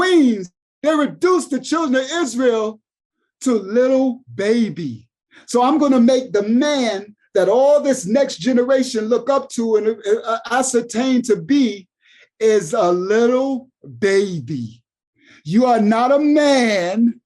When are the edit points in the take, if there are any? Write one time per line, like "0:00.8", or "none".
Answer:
none